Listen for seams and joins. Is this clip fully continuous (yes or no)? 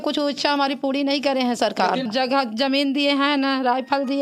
no